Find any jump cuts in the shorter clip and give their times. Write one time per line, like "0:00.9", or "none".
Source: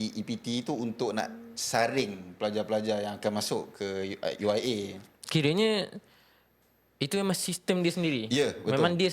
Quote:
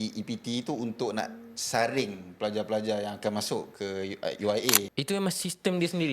0:04.9